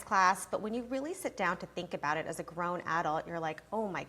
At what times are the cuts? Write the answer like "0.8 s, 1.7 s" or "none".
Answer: none